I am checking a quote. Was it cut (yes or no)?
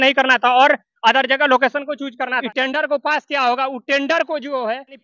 yes